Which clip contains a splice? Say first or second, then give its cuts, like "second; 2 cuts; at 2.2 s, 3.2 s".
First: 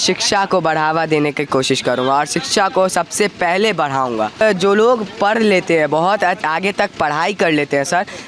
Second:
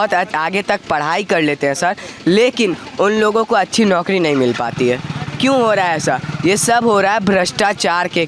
first; 1 cut; at 4.4 s